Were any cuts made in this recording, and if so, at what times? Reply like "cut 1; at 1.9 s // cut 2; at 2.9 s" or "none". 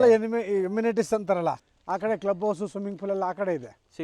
cut 1; at 1.6 s

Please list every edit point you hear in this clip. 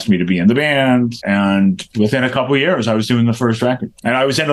cut 1; at 1.1 s

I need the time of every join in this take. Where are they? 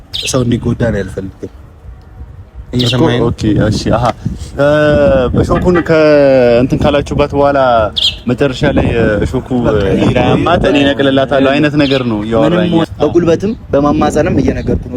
cut 1; at 12.8 s

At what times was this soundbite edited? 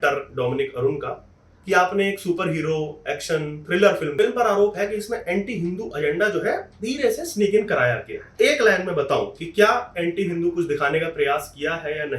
cut 1; at 4.1 s // cut 2; at 8.2 s

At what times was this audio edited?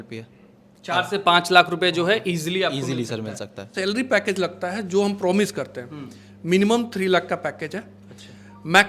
cut 1; at 3.7 s

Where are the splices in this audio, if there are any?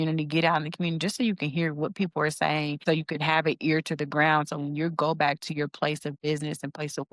cut 1; at 2.8 s

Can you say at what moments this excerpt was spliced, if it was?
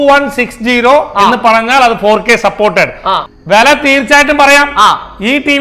cut 1; at 3.3 s

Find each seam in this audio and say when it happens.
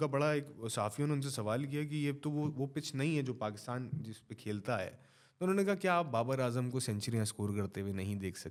none

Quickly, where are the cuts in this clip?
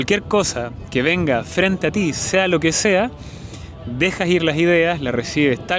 none

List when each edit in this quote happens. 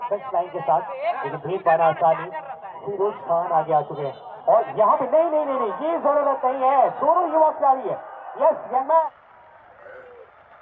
cut 1; at 9.0 s

